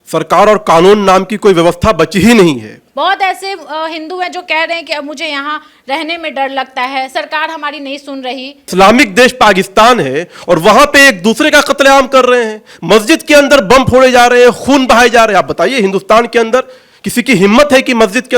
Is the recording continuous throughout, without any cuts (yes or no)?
no